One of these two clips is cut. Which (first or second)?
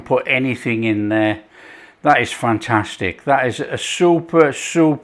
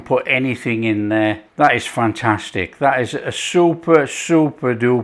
second